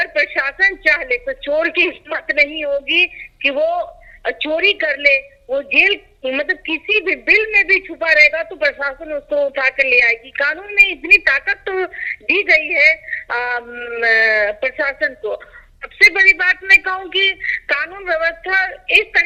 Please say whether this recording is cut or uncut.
uncut